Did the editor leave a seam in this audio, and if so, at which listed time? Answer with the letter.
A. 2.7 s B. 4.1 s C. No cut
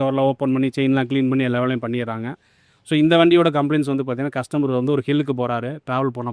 C